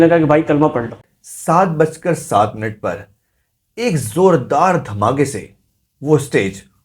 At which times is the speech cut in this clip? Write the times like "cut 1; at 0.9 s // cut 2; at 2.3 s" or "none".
cut 1; at 1.1 s